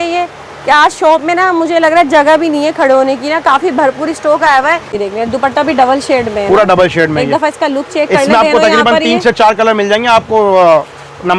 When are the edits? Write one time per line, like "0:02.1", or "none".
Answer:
0:04.9